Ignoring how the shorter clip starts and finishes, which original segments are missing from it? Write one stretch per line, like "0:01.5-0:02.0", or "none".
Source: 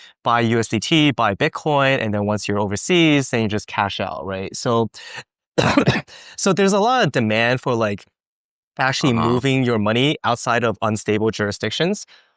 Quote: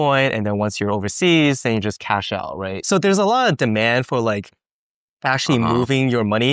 0:04.4-0:06.2